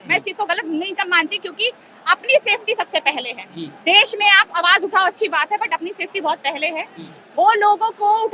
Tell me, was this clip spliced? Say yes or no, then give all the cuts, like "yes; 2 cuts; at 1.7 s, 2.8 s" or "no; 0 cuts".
no; 0 cuts